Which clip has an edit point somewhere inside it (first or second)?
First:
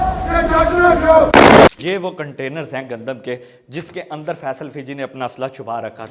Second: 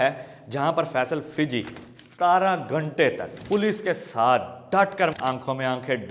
second